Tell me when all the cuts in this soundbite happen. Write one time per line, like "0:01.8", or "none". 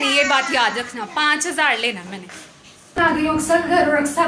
0:03.0